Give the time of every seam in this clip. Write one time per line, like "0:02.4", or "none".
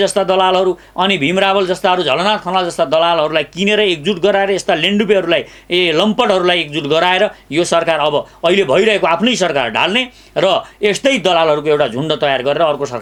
none

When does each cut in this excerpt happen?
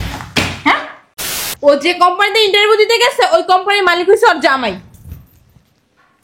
0:01.5

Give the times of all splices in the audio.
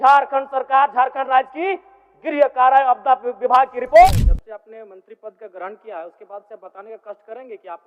0:04.1

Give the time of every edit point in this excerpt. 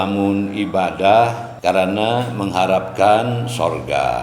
0:01.5

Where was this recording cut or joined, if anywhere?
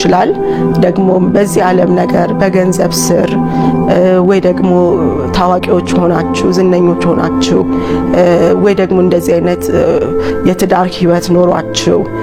none

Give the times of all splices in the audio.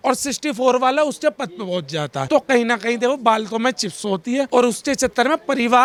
none

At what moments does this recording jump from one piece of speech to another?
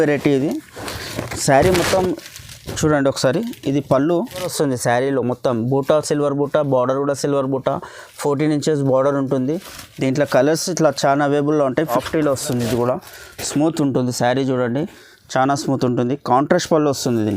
0:04.5
0:12.0

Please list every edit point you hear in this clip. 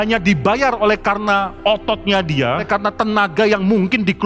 0:02.6

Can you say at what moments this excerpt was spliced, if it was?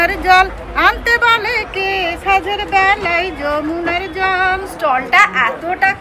0:04.7

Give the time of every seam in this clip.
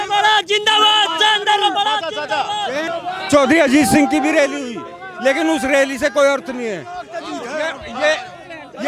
0:02.9

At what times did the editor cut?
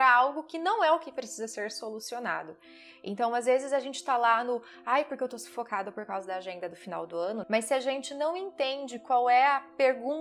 0:07.4

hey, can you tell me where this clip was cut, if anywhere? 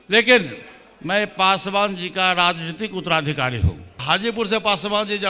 0:04.0

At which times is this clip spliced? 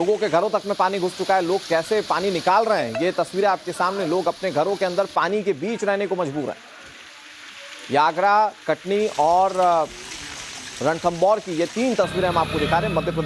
none

